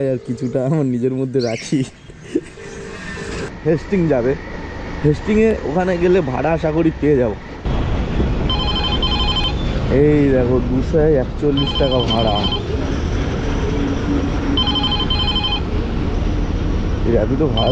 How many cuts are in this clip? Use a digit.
2